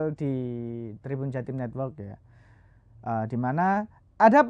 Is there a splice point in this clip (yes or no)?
no